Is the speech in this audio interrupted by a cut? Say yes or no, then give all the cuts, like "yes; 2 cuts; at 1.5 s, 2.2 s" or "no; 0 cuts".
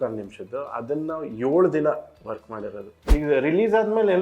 yes; 1 cut; at 2.9 s